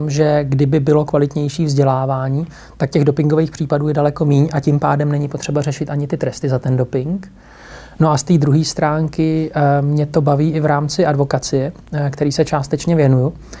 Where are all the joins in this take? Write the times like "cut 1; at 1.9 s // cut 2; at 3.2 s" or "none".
none